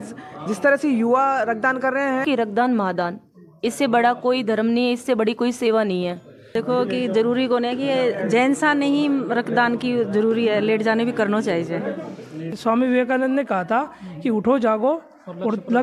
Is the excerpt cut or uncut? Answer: cut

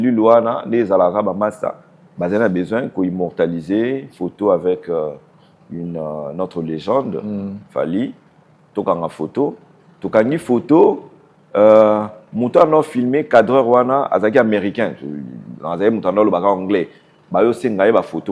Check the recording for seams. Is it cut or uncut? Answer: uncut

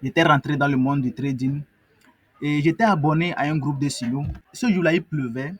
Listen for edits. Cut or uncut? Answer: cut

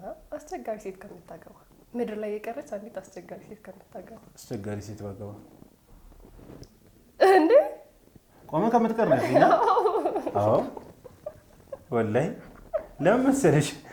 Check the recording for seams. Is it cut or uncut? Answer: uncut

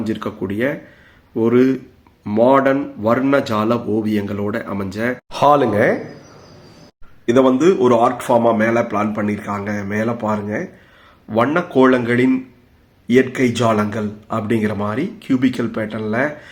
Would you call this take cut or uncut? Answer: uncut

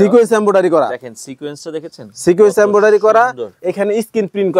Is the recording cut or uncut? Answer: uncut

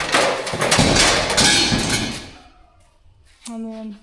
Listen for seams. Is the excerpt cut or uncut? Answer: uncut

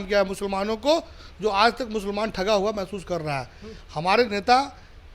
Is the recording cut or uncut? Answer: uncut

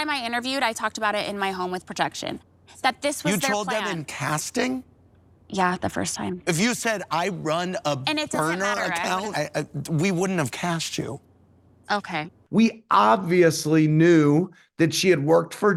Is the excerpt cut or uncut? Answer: uncut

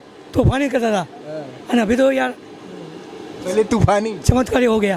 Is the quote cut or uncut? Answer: uncut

